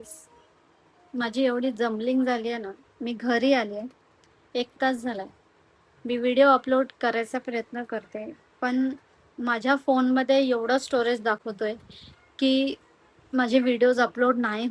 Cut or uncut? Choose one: uncut